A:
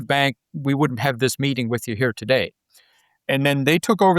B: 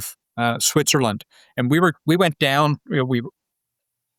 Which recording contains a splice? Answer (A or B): A